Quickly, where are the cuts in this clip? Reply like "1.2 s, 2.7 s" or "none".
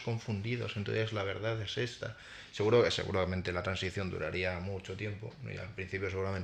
none